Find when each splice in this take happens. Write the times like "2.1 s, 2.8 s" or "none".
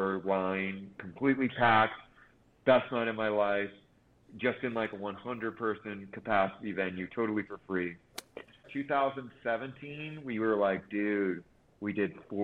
8.6 s